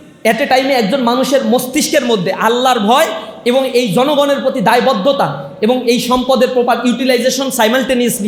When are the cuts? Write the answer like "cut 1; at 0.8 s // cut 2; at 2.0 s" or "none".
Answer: none

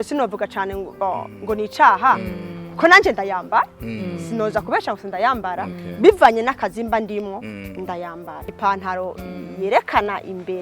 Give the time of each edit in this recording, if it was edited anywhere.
cut 1; at 8.5 s

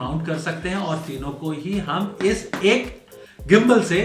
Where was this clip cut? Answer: none

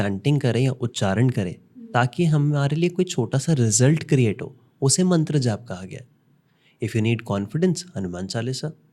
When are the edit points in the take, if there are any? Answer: none

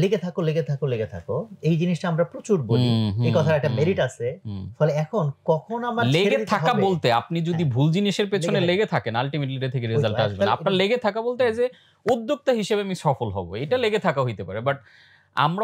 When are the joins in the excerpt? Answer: none

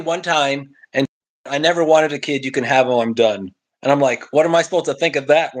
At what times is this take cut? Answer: none

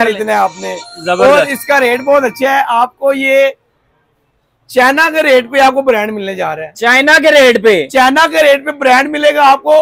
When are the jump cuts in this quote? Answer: none

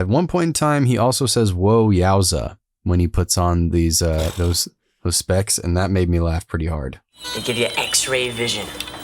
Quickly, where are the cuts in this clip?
none

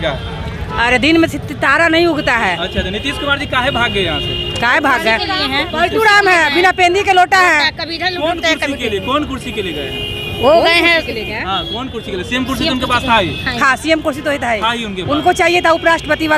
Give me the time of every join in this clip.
none

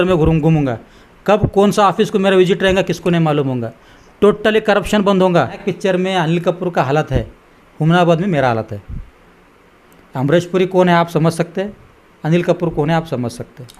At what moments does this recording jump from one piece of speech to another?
cut 1; at 5.7 s

